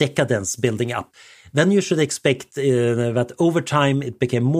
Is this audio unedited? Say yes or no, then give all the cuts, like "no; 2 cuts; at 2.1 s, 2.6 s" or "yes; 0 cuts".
no; 1 cut; at 1.1 s